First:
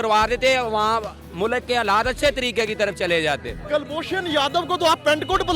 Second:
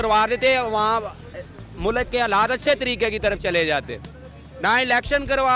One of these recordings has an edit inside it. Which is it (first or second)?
first